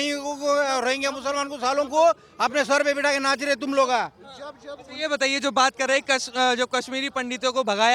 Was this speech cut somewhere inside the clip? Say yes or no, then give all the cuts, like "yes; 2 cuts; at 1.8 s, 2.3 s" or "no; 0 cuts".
no; 0 cuts